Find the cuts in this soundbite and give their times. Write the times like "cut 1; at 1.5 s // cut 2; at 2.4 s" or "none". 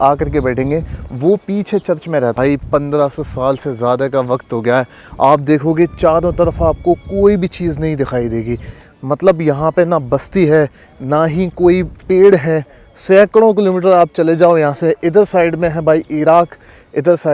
cut 1; at 2.3 s